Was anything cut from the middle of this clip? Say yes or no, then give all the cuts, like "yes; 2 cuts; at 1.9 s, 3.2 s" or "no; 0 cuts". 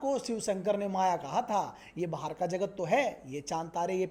no; 0 cuts